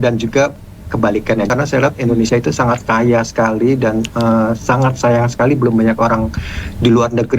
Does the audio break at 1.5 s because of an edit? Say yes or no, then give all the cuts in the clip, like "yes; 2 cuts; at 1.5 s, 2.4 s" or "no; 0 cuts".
yes; 1 cut; at 1.5 s